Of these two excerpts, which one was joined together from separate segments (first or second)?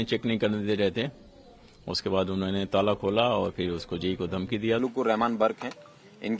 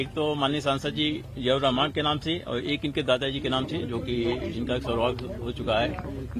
first